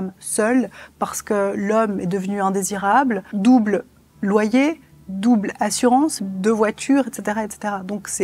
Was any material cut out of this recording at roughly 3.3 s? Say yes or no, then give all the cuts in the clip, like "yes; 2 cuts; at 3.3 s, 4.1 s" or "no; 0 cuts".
yes; 2 cuts; at 3.3 s, 6.2 s